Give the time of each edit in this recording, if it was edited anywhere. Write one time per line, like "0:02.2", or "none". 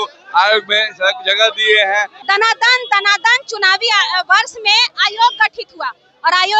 0:02.1